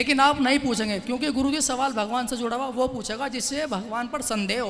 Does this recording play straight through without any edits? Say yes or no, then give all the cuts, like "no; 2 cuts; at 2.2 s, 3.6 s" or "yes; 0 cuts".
yes; 0 cuts